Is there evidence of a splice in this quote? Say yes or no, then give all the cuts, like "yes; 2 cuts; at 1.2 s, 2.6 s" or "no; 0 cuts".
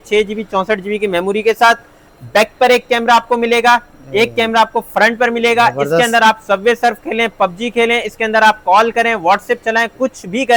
no; 0 cuts